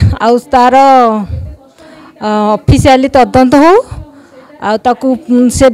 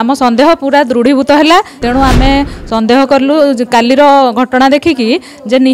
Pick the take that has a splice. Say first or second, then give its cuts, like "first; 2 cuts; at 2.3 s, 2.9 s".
second; 1 cut; at 1.8 s